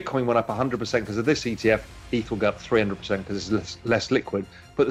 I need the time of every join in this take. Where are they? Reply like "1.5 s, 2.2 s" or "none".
none